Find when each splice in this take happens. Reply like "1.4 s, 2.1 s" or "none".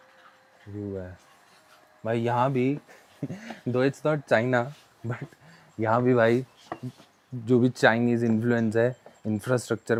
none